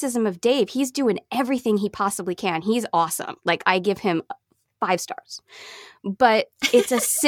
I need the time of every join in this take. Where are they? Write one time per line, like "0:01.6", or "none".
none